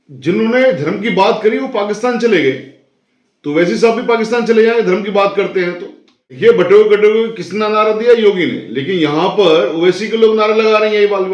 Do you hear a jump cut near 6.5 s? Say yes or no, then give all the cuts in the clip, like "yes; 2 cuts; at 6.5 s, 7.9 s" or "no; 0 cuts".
yes; 1 cut; at 6.5 s